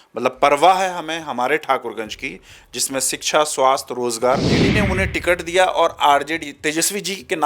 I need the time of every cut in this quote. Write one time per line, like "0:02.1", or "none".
0:04.6